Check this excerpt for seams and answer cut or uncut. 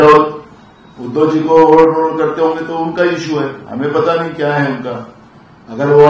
uncut